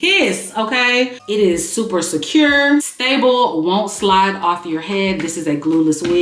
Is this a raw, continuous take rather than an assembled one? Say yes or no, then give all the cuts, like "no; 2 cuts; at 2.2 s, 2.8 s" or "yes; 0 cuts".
no; 1 cut; at 1.2 s